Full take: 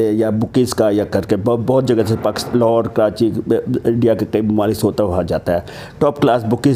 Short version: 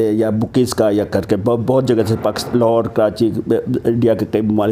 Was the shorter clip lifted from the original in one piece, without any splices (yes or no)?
yes